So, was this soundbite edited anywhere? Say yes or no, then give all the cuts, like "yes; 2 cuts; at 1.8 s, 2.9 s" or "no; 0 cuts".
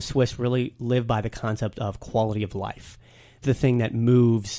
yes; 1 cut; at 3.4 s